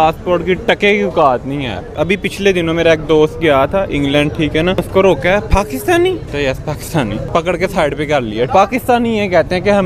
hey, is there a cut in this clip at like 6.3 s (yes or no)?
yes